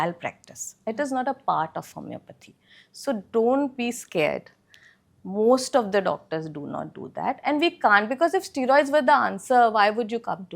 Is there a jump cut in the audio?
no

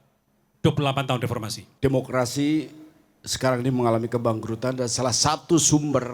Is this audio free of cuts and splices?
no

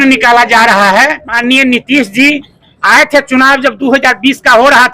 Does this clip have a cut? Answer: yes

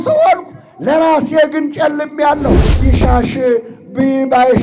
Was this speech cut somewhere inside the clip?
yes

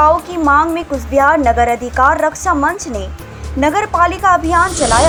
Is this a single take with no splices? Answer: yes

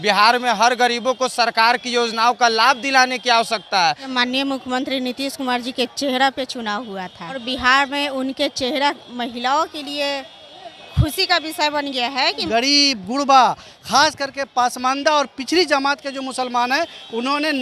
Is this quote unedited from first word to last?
no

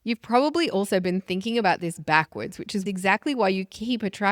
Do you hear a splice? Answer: yes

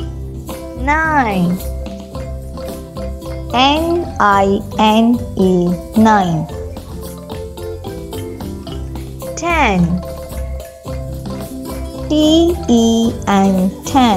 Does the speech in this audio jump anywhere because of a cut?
no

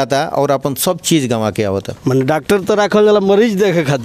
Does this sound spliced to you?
yes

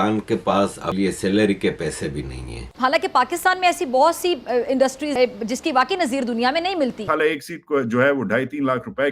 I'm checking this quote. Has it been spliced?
yes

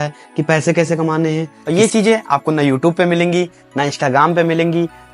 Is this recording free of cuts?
no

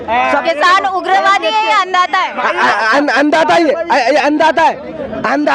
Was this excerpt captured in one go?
yes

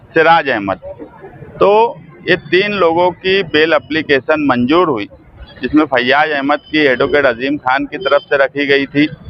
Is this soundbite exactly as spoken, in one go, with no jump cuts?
yes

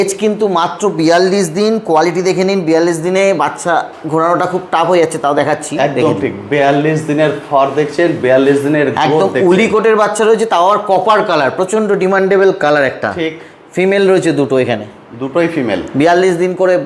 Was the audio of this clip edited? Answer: no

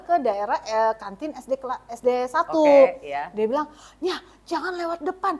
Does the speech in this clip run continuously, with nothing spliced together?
yes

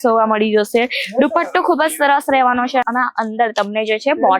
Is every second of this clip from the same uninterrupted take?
yes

